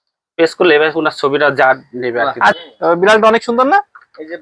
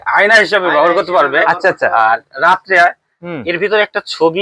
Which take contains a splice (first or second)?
first